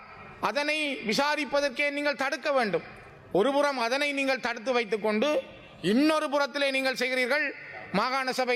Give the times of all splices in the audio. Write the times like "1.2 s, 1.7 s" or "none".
none